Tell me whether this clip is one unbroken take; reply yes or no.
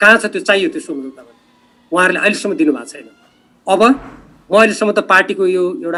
yes